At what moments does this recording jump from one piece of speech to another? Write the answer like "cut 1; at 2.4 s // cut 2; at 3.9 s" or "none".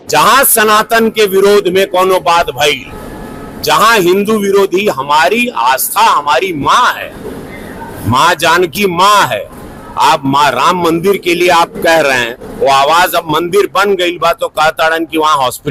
none